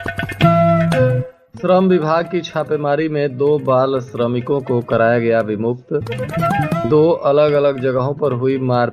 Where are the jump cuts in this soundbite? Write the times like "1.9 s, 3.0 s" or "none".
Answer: 1.4 s